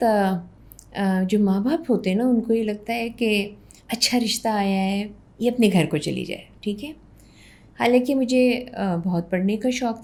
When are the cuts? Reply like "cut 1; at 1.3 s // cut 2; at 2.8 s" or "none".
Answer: none

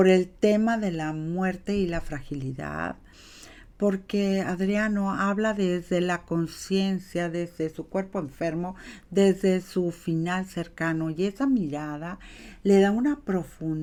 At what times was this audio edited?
none

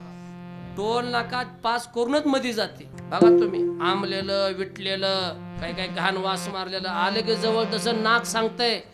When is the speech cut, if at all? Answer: cut 1; at 2.8 s

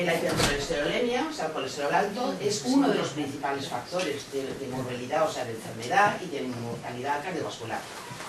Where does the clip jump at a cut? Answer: cut 1; at 2.4 s

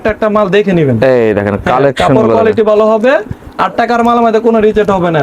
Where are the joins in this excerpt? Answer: none

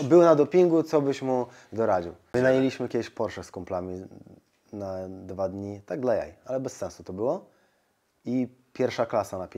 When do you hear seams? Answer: cut 1; at 2.2 s

